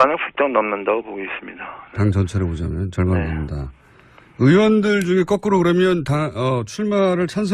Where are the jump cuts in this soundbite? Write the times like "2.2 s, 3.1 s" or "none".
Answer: 4.5 s